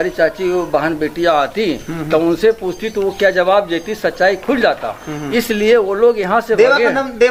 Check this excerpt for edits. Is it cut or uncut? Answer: uncut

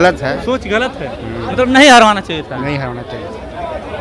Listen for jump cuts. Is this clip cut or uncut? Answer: uncut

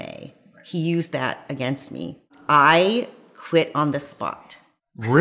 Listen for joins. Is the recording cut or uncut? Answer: cut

